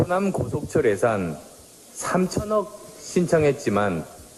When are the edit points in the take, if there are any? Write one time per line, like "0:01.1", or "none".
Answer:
0:02.1